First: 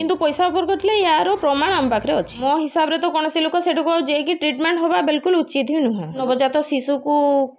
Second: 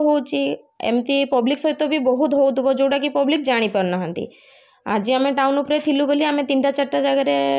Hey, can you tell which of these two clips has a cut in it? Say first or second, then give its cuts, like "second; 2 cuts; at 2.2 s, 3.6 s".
first; 2 cuts; at 2.4 s, 6.2 s